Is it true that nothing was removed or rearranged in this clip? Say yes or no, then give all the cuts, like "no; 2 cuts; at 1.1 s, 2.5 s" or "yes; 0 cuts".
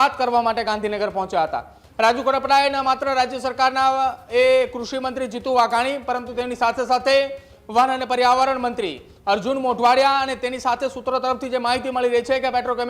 yes; 0 cuts